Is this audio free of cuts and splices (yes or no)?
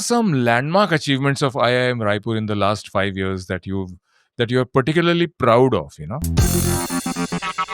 no